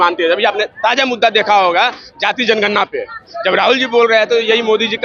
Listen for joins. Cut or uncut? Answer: uncut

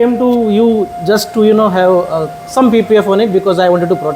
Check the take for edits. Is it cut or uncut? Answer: uncut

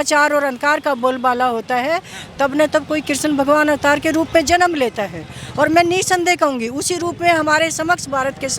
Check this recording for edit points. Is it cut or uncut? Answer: uncut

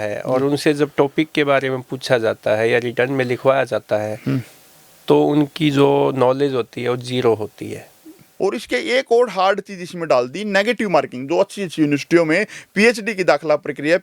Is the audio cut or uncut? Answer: cut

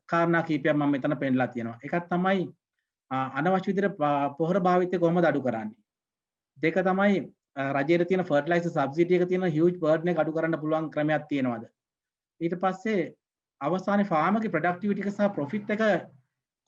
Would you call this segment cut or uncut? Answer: uncut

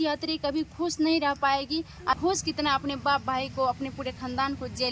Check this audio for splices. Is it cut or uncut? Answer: cut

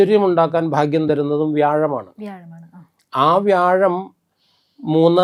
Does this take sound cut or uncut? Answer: uncut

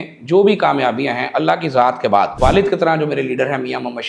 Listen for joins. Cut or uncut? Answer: cut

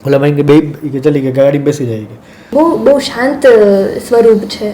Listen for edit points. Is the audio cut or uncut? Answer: cut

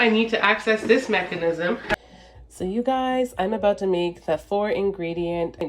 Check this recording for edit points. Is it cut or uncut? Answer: cut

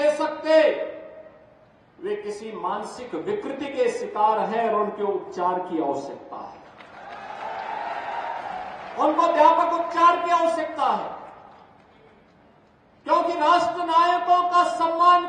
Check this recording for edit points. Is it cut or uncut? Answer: uncut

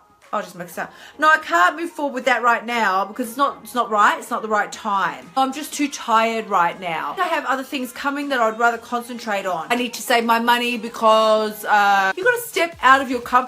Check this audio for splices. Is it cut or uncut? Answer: cut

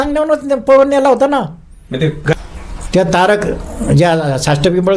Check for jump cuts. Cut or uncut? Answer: cut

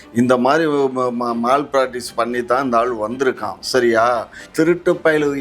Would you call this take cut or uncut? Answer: cut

